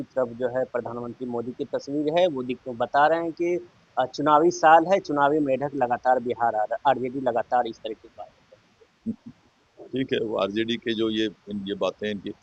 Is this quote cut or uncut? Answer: uncut